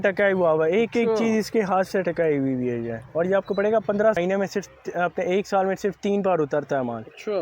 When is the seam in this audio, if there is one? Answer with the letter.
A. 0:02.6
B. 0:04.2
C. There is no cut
B